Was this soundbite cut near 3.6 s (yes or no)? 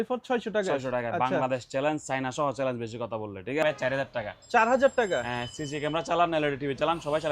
yes